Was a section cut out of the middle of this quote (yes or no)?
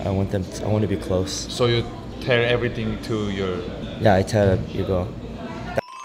yes